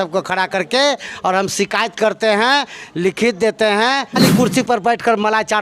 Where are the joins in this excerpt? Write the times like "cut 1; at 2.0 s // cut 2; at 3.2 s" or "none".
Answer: cut 1; at 4.2 s